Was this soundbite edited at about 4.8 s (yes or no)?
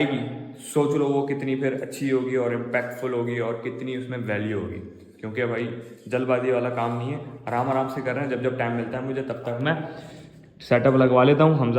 no